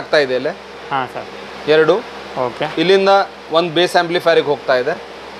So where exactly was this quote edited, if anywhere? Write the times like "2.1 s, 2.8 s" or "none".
none